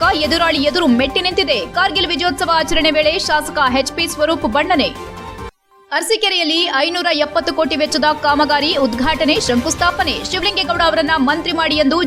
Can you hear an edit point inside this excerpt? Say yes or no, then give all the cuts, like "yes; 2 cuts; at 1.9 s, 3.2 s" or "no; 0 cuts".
no; 0 cuts